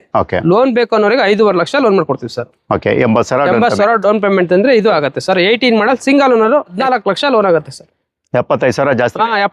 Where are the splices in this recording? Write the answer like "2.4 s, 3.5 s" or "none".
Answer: 6.7 s

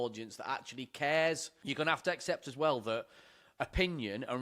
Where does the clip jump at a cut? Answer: 1.5 s

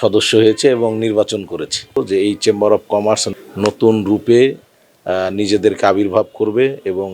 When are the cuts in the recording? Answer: 2.0 s

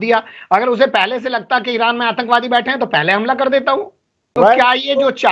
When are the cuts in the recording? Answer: 4.4 s

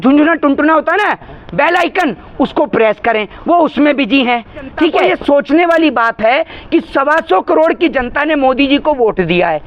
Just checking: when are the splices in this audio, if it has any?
5.1 s

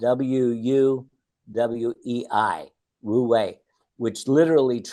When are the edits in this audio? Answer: none

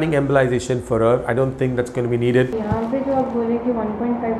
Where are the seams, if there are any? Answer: 2.5 s

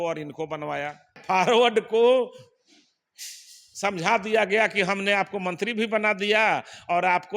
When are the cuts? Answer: 1.1 s

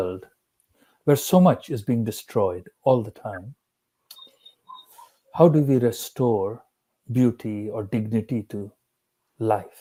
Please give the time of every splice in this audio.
none

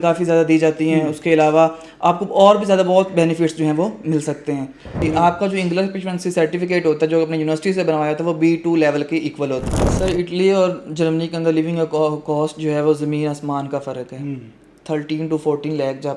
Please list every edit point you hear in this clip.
5.0 s, 9.7 s, 14.7 s

